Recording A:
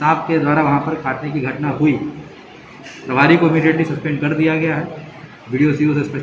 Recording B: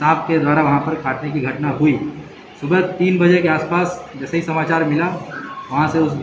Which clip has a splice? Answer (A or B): A